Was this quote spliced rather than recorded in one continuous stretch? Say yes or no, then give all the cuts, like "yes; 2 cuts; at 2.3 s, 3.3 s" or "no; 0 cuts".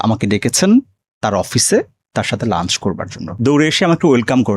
yes; 1 cut; at 3.3 s